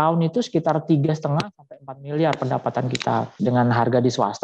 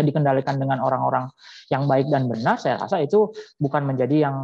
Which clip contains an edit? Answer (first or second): first